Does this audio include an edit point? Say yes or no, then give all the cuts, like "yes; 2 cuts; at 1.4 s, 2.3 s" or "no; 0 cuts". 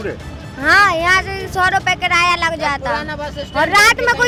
no; 0 cuts